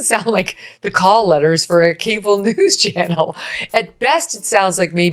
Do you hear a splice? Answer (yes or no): no